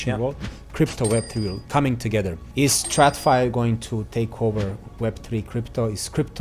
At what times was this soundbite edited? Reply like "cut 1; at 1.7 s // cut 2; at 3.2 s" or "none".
cut 1; at 2.4 s